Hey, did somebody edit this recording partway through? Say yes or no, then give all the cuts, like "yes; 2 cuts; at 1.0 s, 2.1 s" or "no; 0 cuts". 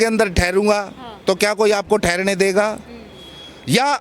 no; 0 cuts